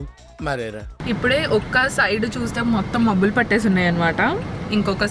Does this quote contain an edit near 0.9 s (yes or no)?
yes